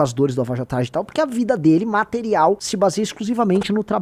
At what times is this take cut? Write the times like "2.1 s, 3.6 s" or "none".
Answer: 2.7 s